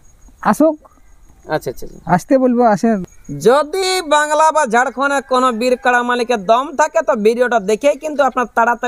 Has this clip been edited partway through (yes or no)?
yes